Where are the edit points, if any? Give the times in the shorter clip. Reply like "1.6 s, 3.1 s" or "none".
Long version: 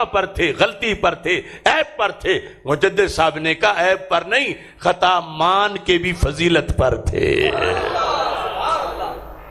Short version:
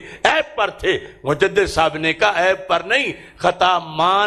none